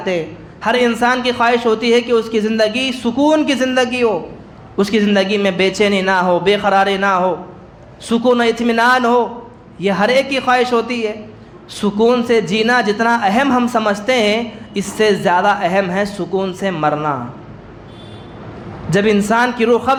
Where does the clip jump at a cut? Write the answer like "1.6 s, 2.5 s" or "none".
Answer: none